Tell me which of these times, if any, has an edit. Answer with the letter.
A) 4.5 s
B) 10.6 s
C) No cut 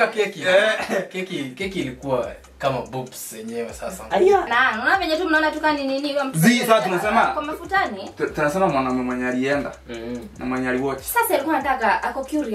A